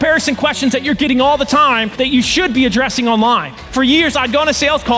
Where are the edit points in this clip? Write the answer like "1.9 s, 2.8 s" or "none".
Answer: 1.9 s, 3.6 s

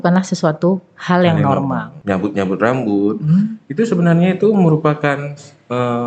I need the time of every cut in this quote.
1.9 s

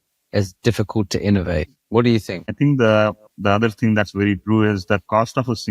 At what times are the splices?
1.8 s, 2.5 s, 3.3 s

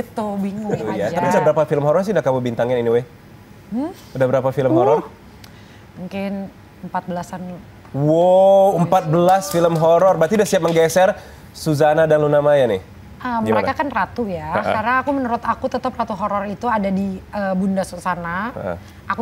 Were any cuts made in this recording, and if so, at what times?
0.9 s

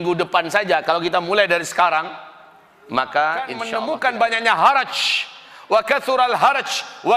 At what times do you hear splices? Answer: 3.7 s

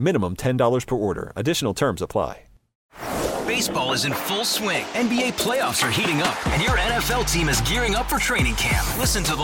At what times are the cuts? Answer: 2.7 s

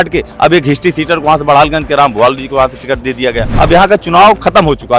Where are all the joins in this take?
3.5 s

